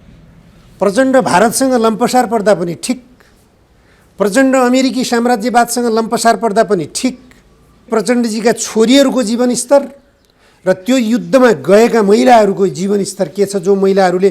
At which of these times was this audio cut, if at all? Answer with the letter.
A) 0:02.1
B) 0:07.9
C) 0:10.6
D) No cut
B